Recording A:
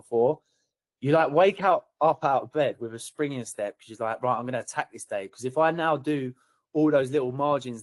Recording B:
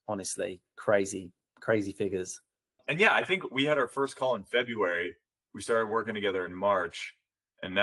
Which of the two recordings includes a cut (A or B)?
B